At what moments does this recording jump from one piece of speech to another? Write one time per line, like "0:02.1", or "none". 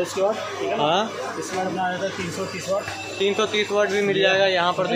none